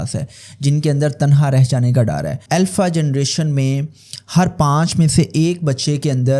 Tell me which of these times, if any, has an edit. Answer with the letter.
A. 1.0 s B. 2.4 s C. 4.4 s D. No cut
B